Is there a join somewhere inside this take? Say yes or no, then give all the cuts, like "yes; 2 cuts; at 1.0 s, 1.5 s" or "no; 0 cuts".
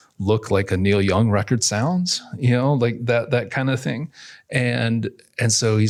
no; 0 cuts